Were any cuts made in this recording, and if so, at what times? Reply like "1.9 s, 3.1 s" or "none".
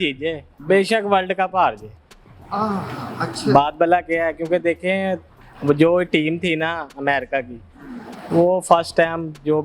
none

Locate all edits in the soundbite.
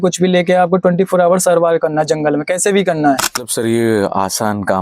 3.5 s

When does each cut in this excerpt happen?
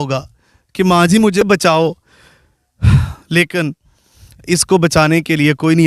1.4 s

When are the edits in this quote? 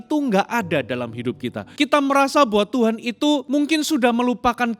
1.6 s, 3.4 s

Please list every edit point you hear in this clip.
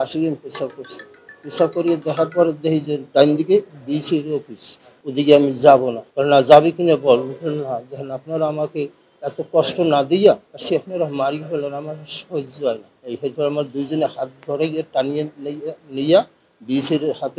5.0 s, 10.5 s

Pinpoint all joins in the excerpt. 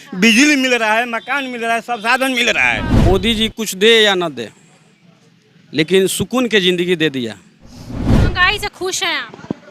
3.1 s, 8.1 s

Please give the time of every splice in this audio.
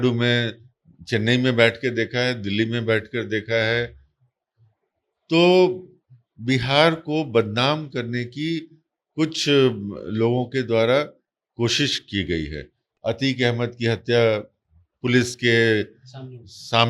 12.8 s

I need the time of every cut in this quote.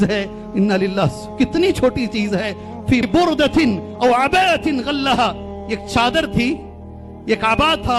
3.1 s

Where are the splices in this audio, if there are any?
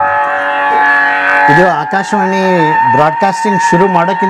none

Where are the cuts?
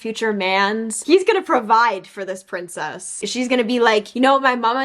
0.9 s, 3.2 s

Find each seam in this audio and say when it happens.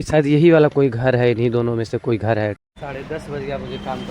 2.6 s

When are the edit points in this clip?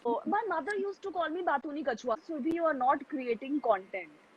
2.2 s

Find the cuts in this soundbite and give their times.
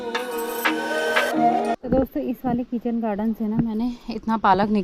1.8 s

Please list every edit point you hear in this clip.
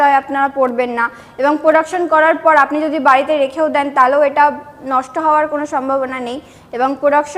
none

